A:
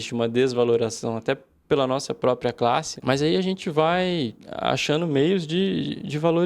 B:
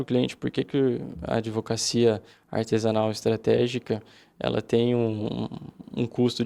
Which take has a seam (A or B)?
A